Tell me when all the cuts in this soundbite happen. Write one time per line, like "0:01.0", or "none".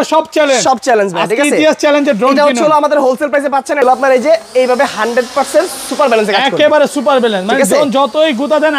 0:03.8